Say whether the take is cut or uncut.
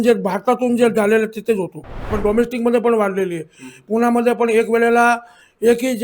cut